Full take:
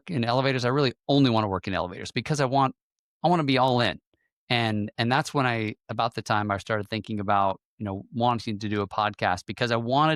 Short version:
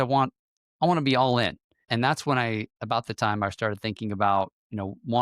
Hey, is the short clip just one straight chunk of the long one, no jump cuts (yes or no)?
no